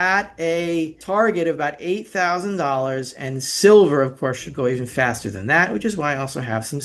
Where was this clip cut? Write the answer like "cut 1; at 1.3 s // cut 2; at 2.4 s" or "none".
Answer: cut 1; at 1.0 s